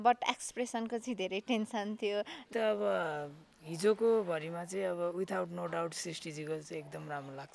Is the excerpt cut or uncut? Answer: cut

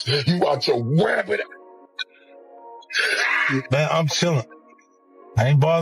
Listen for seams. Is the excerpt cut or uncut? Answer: cut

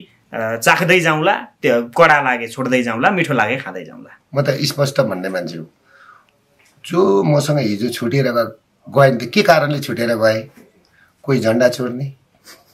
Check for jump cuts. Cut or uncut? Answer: cut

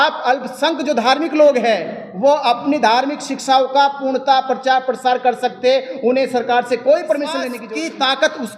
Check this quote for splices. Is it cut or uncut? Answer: cut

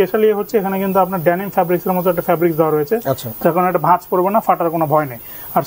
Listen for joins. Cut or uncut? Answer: uncut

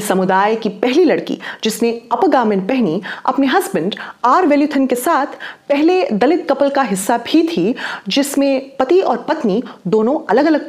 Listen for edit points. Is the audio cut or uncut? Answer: uncut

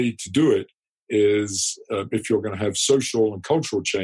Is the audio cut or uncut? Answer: uncut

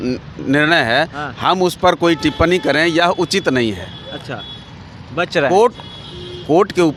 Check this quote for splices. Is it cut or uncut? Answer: uncut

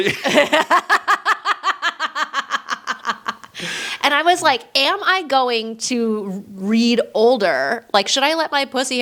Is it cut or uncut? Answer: uncut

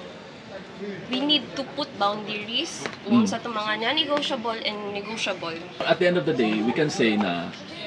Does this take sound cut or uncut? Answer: cut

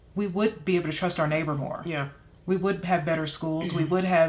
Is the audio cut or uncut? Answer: uncut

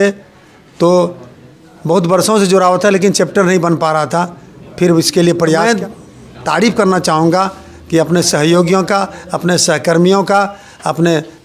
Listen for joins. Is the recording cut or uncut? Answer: cut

